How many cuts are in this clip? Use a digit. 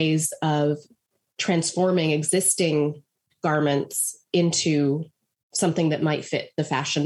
0